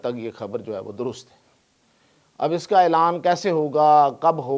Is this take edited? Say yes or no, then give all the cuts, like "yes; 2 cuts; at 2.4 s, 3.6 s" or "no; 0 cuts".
no; 0 cuts